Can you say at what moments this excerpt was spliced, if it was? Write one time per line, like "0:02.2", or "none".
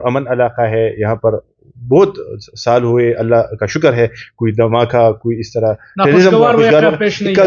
none